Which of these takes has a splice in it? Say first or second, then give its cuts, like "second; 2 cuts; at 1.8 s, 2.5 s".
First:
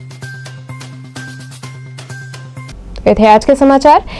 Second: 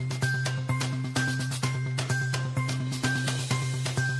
second; 1 cut; at 2.6 s